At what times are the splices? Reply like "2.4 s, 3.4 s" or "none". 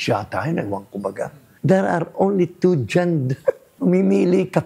1.4 s, 3.7 s